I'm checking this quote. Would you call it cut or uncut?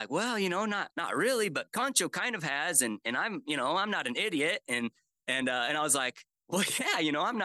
cut